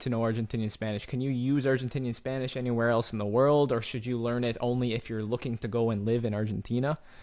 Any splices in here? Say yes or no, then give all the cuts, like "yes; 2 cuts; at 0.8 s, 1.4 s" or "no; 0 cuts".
no; 0 cuts